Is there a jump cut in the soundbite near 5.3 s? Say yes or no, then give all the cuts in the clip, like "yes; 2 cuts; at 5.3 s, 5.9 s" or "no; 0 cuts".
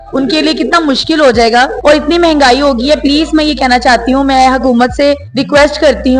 yes; 2 cuts; at 1.7 s, 5.3 s